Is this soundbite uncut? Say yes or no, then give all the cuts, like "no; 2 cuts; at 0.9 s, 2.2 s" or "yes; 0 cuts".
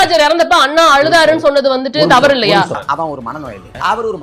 yes; 0 cuts